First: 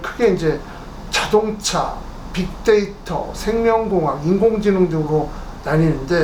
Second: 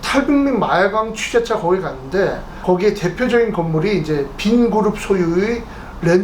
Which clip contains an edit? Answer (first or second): second